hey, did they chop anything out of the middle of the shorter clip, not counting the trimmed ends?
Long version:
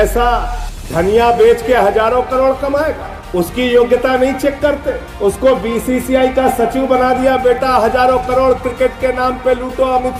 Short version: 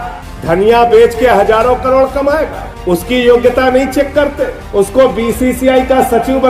no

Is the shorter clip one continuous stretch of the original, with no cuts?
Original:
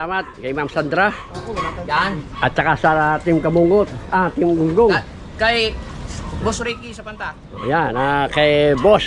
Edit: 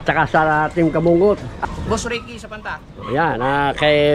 no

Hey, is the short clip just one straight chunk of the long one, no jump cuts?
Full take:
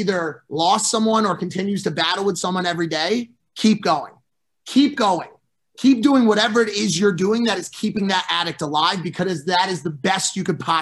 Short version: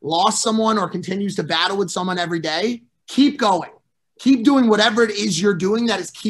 no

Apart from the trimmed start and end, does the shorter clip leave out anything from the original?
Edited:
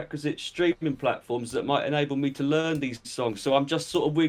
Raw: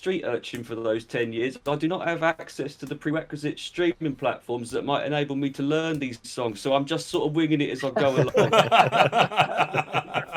no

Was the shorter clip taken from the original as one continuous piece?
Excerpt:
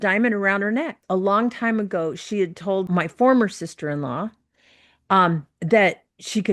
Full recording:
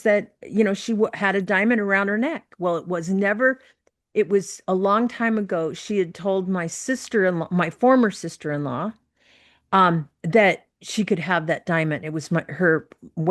no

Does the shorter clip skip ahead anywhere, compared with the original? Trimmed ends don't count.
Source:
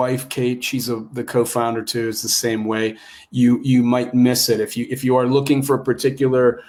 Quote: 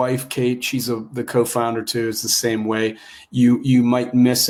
no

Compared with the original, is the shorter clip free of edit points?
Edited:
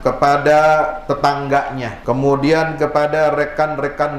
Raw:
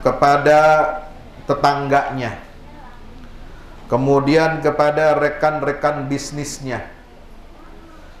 no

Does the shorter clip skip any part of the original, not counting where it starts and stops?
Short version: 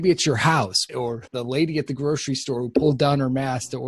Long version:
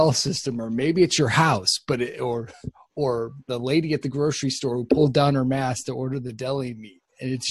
yes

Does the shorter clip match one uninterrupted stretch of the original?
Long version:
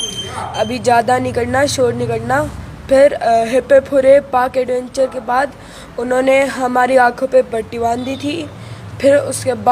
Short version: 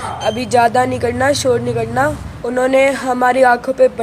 no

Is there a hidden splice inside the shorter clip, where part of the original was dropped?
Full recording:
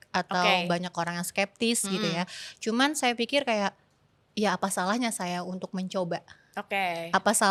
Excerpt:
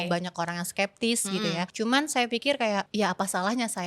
yes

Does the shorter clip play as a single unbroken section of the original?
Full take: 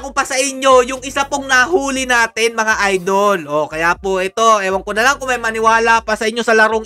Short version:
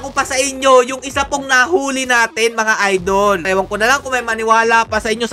no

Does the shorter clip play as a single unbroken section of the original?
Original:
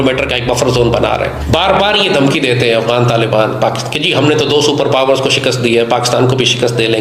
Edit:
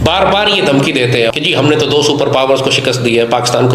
no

